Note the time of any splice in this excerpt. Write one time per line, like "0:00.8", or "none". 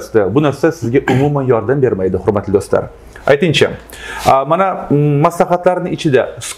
none